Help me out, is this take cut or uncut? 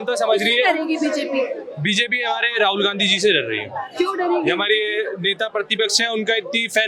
uncut